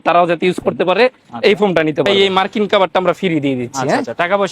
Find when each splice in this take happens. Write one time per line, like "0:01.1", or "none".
0:02.1